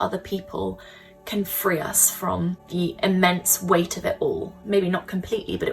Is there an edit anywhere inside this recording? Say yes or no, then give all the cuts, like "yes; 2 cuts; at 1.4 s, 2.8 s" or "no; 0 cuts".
yes; 2 cuts; at 2.6 s, 4.6 s